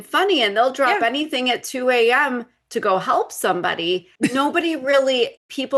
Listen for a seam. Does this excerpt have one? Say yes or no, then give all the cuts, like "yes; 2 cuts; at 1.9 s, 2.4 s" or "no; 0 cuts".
no; 0 cuts